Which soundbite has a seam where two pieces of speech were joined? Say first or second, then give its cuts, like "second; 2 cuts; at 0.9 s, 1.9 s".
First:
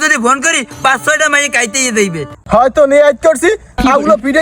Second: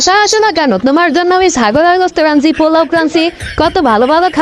first; 1 cut; at 2.3 s